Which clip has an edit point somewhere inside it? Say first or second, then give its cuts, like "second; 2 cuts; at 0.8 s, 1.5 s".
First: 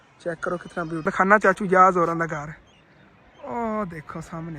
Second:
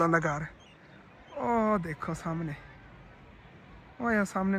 first; 1 cut; at 1.0 s